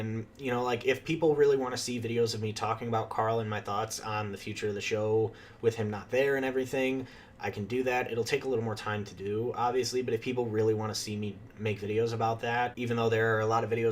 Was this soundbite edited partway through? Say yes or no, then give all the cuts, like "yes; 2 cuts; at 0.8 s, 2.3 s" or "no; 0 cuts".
yes; 1 cut; at 12.8 s